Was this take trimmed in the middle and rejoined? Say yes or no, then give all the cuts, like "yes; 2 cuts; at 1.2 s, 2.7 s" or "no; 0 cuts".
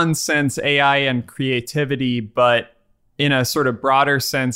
no; 0 cuts